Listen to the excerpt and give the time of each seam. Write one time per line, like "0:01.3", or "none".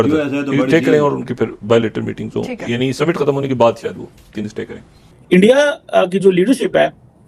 0:05.0